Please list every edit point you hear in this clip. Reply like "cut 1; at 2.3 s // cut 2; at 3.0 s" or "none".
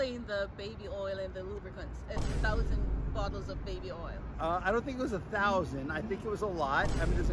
none